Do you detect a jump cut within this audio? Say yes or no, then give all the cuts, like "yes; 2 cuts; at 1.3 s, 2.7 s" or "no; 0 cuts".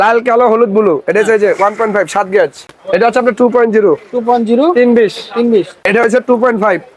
yes; 2 cuts; at 2.7 s, 5.8 s